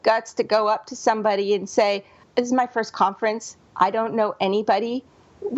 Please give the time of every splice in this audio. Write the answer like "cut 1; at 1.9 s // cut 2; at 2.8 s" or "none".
cut 1; at 2.2 s